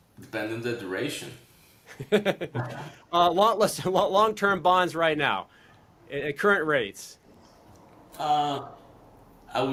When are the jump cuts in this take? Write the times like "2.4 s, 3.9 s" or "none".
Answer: none